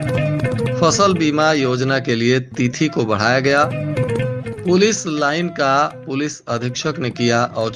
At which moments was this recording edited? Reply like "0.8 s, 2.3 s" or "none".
none